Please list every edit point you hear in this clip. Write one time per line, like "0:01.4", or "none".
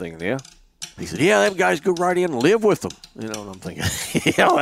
0:00.9